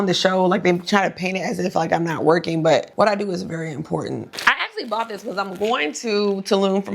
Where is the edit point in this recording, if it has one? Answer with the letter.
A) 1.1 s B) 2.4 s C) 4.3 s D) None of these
C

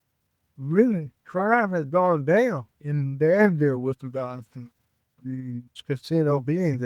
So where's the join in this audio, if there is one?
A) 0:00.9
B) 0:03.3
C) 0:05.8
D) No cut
C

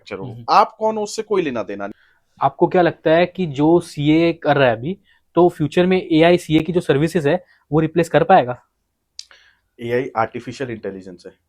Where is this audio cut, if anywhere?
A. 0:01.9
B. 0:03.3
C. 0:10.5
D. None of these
A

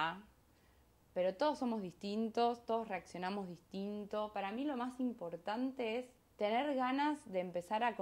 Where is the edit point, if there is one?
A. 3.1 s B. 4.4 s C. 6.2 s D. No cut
C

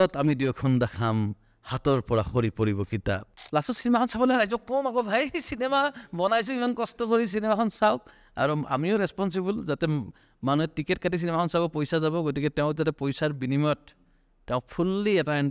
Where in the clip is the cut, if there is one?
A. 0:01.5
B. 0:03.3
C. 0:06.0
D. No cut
B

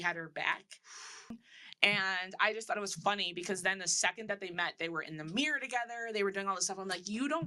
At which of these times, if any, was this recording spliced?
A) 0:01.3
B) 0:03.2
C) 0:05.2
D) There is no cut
A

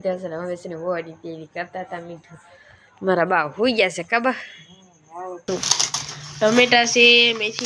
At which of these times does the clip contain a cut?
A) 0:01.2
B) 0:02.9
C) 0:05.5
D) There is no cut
C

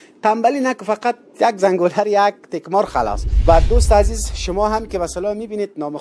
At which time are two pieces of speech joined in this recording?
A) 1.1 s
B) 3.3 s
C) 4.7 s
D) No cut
B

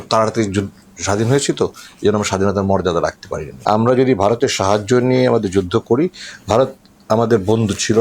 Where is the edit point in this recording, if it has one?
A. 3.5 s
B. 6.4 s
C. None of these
A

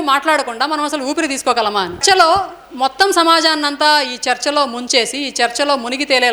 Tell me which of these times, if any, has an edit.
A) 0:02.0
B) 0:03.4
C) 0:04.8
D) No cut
A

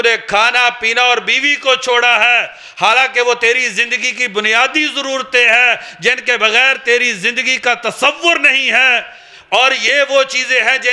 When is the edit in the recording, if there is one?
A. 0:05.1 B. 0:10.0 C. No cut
C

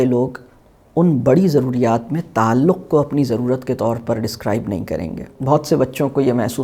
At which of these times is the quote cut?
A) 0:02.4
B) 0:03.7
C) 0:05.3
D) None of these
C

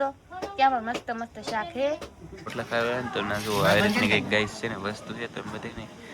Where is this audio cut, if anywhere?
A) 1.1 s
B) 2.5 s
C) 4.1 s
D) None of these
B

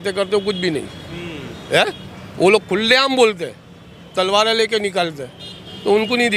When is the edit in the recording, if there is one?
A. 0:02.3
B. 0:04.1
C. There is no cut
C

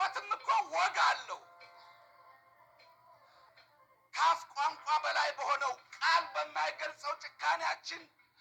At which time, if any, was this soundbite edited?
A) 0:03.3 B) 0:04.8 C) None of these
A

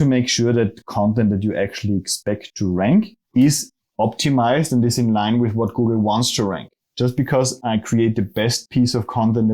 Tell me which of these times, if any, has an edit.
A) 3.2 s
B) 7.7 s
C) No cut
A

